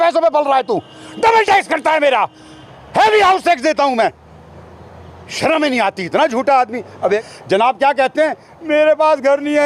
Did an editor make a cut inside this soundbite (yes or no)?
yes